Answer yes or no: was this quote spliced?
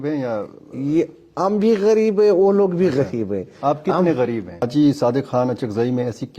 yes